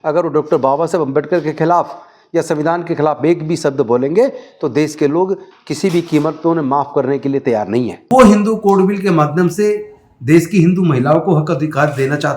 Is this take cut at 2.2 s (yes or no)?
no